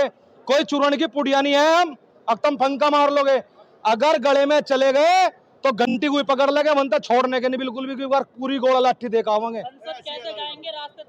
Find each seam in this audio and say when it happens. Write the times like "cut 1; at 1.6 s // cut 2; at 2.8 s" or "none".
none